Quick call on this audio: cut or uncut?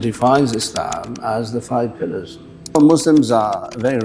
cut